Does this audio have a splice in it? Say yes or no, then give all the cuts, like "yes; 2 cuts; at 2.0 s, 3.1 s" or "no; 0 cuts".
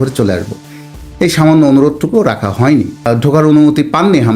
yes; 1 cut; at 3.1 s